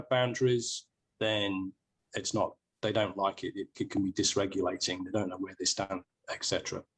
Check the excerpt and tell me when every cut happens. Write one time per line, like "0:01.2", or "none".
0:02.0

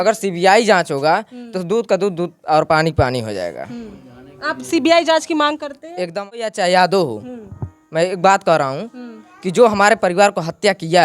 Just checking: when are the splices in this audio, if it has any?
0:06.1

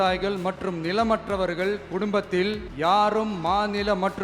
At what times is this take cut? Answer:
0:02.7

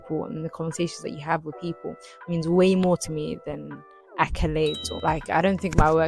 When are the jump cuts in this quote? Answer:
0:04.9

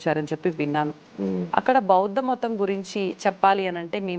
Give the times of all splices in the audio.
0:01.4

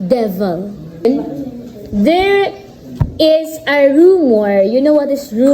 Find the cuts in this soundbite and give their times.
0:01.0

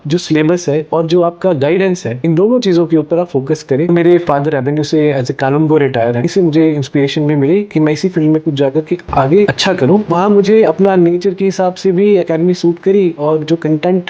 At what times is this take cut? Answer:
0:00.9
0:02.1
0:03.9
0:06.3
0:10.0

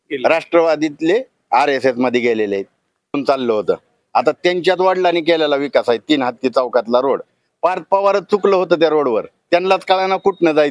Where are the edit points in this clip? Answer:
0:03.2

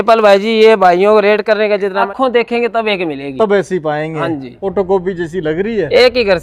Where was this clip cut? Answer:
0:02.1
0:04.5

